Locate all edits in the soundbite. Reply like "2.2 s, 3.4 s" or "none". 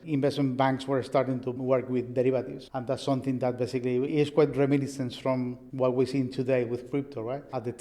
1.5 s, 4.1 s